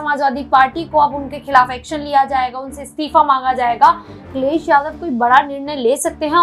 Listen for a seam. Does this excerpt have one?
yes; 1 cut; at 4.3 s

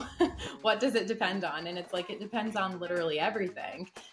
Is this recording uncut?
yes; 0 cuts

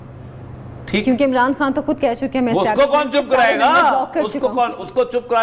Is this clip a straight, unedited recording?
yes; 0 cuts

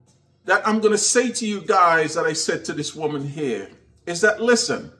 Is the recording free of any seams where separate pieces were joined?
yes; 0 cuts

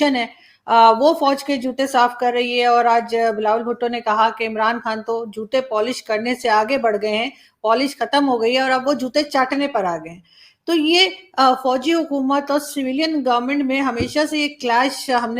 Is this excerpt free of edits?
yes; 0 cuts

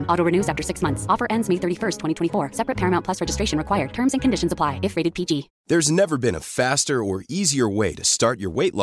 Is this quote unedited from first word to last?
no; 1 cut; at 5.5 s

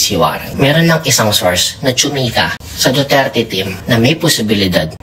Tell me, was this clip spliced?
no; 0 cuts

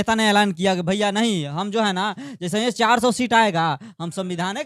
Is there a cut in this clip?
no; 0 cuts

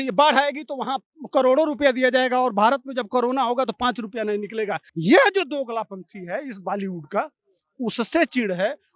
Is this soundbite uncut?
no; 1 cut; at 4.9 s

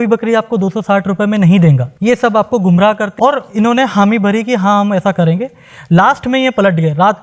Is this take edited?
yes; 2 cuts; at 1.9 s, 3.1 s

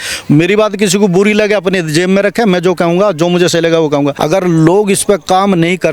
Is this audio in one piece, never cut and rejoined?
no; 1 cut; at 4.2 s

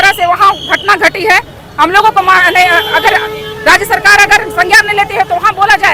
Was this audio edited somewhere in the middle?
no; 0 cuts

